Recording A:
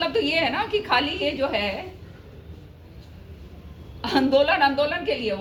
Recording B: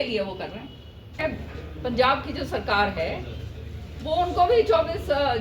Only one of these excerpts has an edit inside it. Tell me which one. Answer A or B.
B